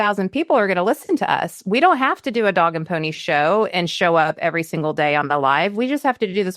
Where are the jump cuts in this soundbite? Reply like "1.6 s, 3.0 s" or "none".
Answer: none